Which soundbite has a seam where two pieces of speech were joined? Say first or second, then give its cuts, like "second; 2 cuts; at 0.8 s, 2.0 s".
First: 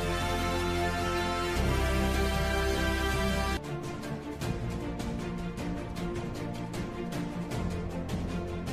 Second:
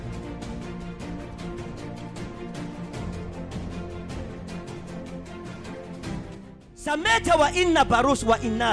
second; 1 cut; at 6.4 s